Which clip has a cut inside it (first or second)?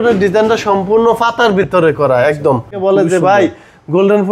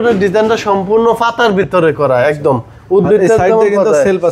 first